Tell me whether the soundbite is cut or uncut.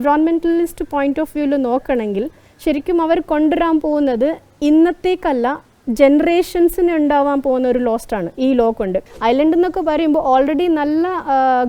cut